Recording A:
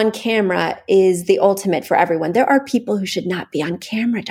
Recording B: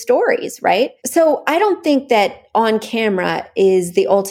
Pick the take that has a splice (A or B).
B